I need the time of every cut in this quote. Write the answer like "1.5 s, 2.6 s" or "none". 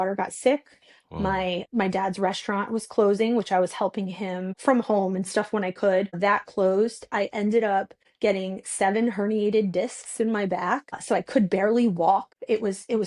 none